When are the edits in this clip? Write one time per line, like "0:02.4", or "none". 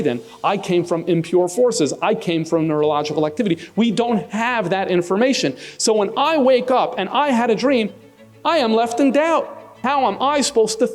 0:09.8